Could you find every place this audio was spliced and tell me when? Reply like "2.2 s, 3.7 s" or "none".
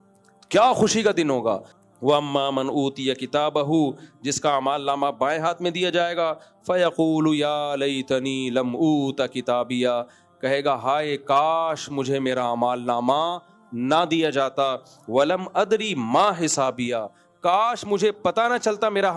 1.7 s